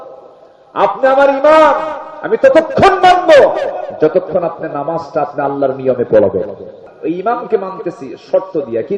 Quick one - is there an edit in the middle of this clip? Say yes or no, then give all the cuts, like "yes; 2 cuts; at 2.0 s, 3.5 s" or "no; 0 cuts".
yes; 1 cut; at 6.9 s